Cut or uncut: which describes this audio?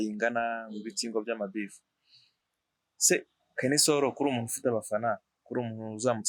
uncut